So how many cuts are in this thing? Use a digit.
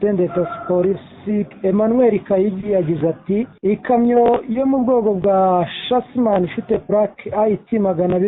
2